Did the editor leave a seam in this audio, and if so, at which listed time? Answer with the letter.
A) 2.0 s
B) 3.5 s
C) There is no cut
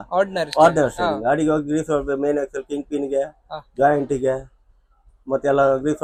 C